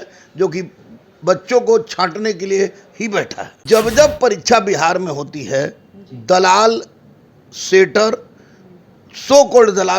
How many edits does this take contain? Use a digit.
1